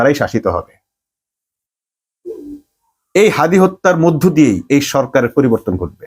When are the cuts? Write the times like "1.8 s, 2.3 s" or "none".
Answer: none